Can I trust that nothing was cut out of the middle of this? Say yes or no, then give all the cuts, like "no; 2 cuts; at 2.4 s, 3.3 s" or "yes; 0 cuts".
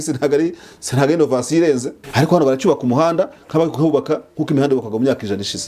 no; 1 cut; at 1.9 s